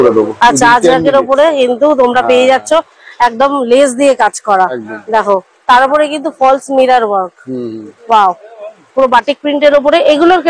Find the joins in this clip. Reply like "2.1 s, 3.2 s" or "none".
none